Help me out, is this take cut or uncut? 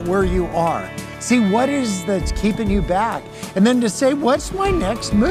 uncut